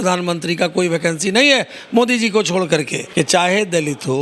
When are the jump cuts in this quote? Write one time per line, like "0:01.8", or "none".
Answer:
0:03.0